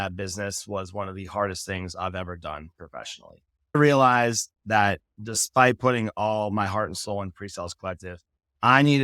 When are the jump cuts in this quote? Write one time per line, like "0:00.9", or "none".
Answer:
0:03.7